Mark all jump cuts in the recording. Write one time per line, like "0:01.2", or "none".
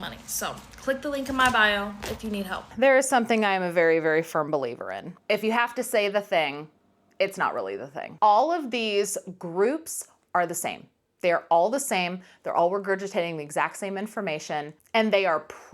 0:02.7
0:08.1